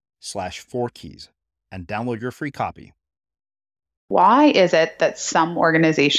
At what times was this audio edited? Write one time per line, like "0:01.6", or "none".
0:04.1